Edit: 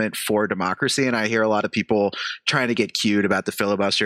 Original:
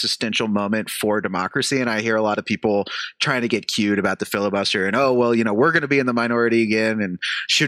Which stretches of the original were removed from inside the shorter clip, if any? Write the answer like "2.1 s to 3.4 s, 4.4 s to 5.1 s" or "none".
none